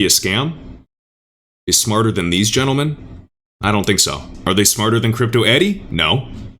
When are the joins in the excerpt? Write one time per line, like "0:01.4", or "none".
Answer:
none